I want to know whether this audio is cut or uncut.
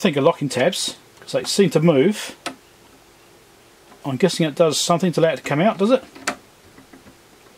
uncut